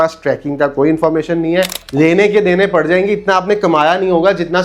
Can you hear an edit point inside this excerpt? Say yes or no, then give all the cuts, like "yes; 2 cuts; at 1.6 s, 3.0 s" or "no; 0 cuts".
yes; 1 cut; at 1.8 s